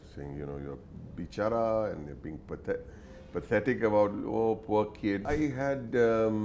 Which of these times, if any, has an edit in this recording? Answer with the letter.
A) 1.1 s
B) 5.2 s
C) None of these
B